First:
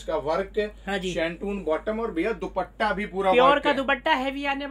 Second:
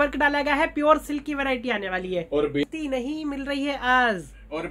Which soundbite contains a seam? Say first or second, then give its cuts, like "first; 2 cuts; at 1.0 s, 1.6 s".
second; 1 cut; at 2.6 s